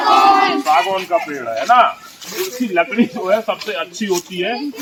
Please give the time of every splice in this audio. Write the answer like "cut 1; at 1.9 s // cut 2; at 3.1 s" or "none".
none